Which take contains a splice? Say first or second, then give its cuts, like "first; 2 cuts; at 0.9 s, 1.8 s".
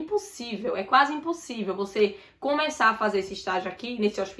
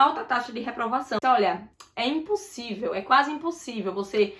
second; 1 cut; at 1.2 s